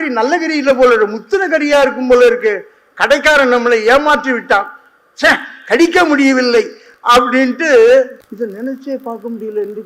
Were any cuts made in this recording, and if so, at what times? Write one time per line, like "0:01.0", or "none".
0:08.2